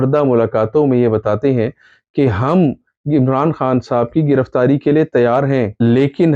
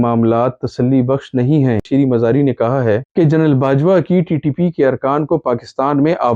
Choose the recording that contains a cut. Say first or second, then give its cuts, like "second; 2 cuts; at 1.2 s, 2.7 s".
second; 1 cut; at 1.9 s